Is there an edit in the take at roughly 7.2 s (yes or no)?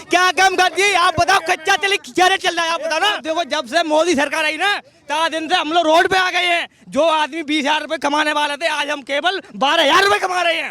no